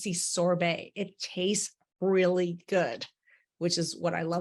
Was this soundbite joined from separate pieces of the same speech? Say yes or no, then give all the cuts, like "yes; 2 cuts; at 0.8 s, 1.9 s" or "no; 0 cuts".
no; 0 cuts